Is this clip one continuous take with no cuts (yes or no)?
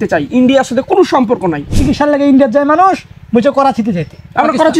no